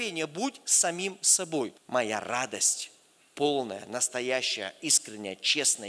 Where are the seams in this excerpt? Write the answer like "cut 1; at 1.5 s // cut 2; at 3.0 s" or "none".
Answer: cut 1; at 1.8 s